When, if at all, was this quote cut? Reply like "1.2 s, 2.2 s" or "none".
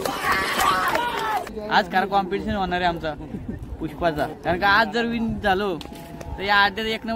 1.5 s, 4.4 s